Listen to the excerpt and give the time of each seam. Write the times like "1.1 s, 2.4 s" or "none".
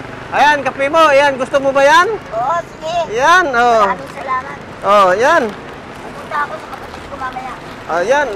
none